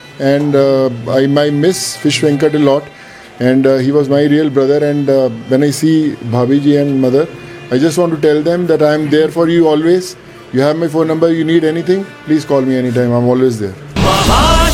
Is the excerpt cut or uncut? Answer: uncut